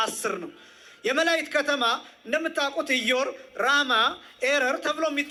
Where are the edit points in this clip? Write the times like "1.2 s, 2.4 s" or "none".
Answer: none